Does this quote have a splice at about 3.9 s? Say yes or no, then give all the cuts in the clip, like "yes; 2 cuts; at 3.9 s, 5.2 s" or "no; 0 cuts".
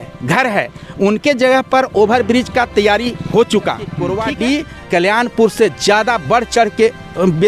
yes; 1 cut; at 3.9 s